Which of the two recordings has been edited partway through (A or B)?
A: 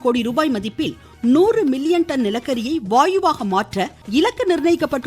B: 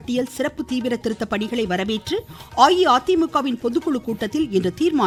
A